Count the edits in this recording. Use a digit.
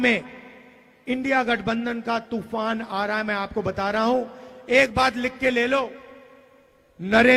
0